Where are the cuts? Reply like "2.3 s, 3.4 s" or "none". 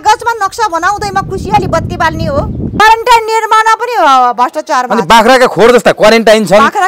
2.8 s